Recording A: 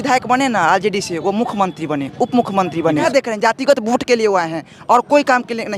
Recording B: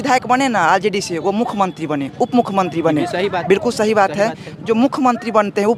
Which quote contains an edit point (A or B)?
A